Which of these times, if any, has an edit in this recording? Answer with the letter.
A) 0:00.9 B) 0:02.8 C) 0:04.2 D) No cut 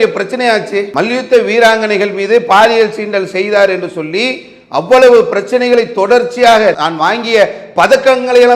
A